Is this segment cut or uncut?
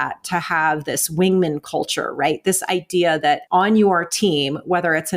cut